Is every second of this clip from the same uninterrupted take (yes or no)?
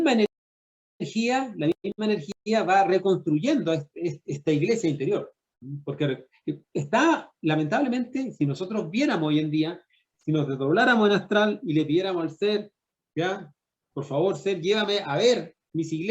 yes